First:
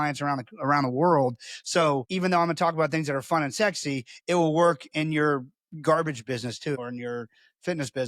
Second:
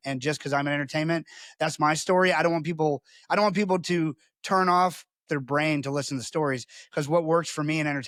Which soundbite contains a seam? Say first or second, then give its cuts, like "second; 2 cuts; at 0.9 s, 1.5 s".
first; 1 cut; at 6.8 s